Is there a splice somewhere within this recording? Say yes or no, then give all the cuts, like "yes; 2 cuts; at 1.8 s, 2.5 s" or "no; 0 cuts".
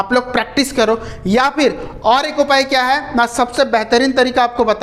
no; 0 cuts